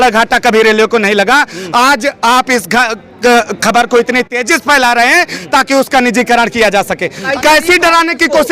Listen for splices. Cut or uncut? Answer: cut